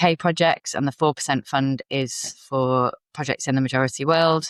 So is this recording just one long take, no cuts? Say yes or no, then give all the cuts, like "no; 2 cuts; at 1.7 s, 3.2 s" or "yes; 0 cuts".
yes; 0 cuts